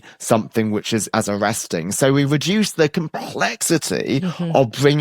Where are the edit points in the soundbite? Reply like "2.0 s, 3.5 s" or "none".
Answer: 1.1 s